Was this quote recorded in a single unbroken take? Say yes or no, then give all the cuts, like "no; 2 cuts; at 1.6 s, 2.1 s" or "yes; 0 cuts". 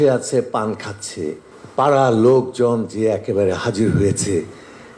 no; 1 cut; at 1.5 s